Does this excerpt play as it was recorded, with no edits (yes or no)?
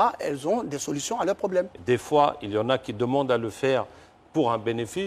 no